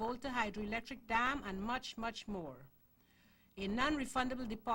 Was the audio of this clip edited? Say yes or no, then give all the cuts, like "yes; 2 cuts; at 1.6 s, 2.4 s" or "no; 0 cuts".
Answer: no; 0 cuts